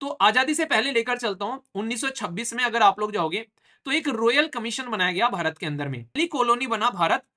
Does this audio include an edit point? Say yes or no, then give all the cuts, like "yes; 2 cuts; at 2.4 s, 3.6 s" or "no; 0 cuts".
yes; 1 cut; at 6.1 s